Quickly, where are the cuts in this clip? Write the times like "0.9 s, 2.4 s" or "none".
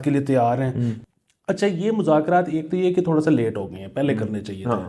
1.0 s